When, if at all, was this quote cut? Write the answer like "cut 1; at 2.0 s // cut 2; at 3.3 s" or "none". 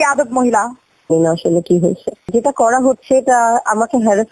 cut 1; at 1.1 s